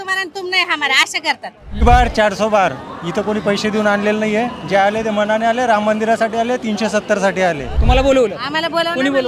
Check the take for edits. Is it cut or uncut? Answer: cut